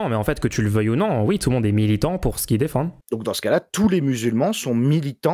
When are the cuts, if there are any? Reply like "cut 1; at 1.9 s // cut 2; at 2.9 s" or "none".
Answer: cut 1; at 3.0 s